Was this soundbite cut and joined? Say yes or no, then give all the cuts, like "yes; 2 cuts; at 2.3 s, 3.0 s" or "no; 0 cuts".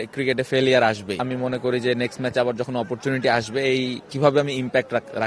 yes; 1 cut; at 1.2 s